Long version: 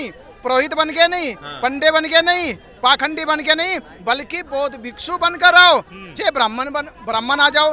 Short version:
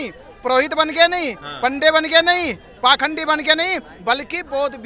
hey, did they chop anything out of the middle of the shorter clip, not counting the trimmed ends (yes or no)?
no